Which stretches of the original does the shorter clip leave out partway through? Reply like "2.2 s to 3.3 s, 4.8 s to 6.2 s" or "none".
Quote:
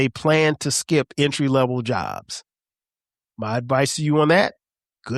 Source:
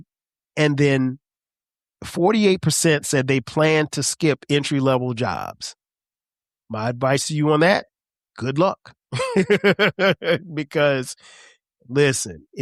none